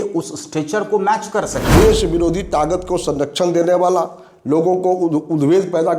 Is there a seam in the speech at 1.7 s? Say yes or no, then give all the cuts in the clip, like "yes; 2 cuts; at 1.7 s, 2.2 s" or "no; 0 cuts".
yes; 1 cut; at 1.7 s